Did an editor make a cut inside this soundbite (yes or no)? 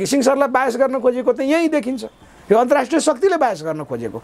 no